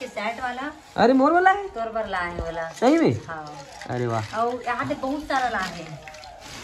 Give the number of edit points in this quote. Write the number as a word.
zero